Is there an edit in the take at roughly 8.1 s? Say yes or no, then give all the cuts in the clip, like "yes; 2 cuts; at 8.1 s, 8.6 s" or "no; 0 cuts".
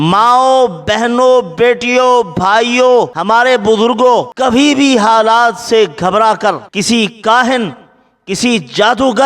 no; 3 cuts; at 3.1 s, 4.3 s, 6.7 s